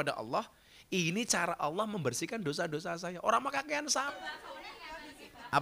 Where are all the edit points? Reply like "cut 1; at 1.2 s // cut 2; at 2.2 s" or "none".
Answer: cut 1; at 4.1 s